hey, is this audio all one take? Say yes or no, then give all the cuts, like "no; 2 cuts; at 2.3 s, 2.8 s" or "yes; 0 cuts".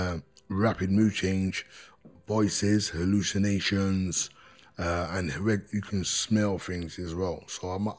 yes; 0 cuts